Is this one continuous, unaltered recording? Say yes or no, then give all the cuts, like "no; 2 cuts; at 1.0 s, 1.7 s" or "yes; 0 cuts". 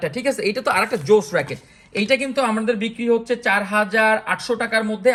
yes; 0 cuts